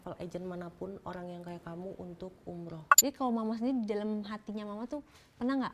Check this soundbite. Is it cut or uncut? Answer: cut